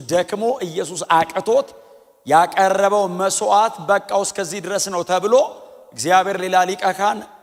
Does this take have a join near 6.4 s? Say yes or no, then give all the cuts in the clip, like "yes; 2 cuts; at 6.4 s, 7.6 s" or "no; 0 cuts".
no; 0 cuts